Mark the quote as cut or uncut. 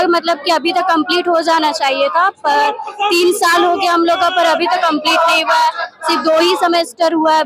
uncut